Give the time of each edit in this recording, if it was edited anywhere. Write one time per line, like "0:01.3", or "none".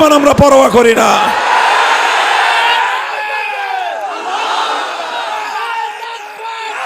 none